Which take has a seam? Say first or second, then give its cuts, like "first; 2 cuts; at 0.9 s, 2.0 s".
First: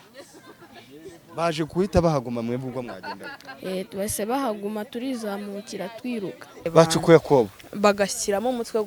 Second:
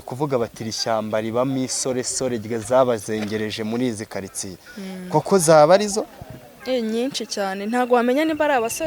first; 1 cut; at 6.6 s